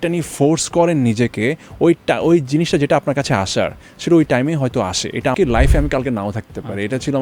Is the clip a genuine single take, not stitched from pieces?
no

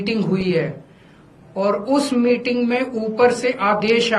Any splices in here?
no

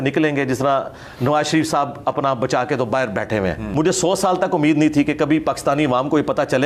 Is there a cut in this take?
yes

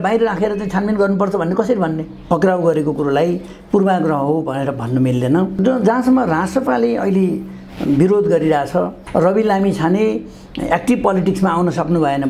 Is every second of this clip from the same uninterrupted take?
no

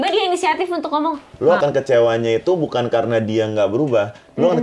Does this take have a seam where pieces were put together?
yes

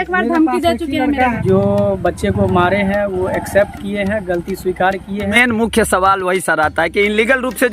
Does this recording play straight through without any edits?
no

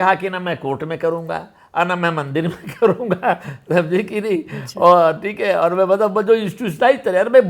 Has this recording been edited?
no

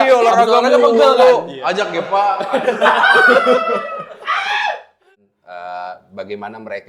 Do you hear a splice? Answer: yes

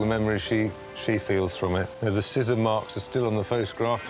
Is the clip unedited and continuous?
no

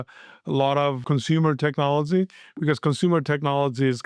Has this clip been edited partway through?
yes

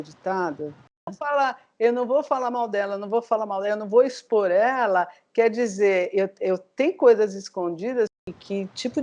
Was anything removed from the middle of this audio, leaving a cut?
yes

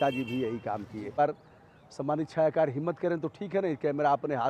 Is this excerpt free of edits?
no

